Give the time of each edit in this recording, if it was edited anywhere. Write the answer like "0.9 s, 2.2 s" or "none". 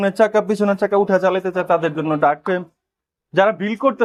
none